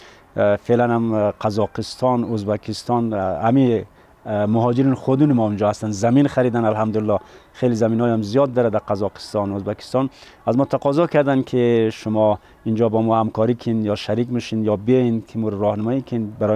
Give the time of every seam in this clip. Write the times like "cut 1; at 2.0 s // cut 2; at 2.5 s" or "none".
none